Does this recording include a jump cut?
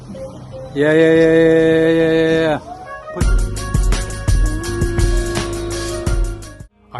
yes; 1 cut; at 3.0 s

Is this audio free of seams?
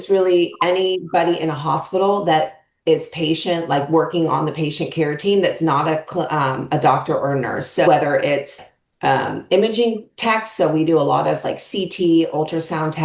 yes; 0 cuts

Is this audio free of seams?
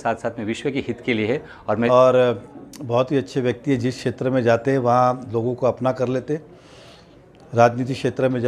no; 1 cut; at 1.9 s

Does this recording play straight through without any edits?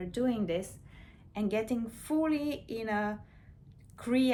yes; 0 cuts

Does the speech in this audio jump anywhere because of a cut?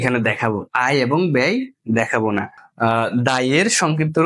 yes; 1 cut; at 2.6 s

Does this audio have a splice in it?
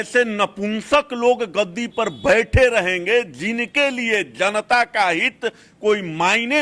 no; 0 cuts

